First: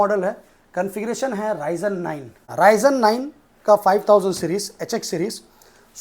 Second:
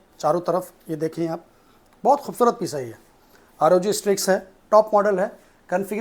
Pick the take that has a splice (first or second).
first